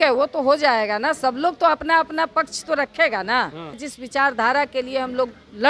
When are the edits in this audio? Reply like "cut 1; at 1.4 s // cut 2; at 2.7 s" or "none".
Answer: cut 1; at 3.9 s